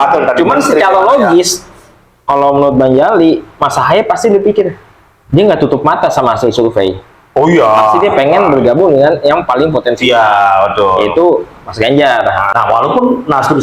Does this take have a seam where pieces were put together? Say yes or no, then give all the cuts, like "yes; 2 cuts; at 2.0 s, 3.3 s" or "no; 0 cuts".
yes; 1 cut; at 12.5 s